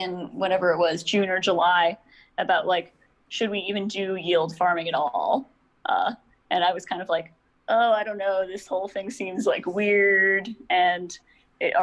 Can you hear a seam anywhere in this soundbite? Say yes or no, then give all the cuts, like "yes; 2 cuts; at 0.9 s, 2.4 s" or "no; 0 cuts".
no; 0 cuts